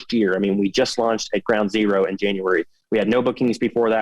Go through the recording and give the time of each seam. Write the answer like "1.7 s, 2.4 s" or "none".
none